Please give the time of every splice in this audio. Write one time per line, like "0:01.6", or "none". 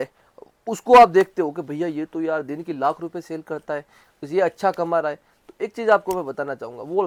none